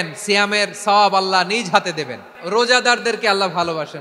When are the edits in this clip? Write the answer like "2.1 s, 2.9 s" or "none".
2.3 s